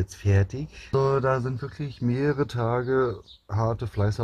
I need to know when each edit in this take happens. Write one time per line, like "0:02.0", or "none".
0:00.9